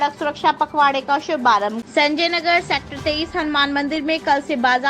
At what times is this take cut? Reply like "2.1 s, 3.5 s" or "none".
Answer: 1.8 s